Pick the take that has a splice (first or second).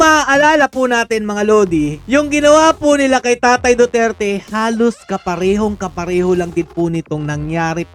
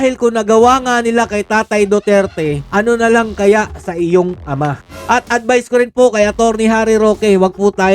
second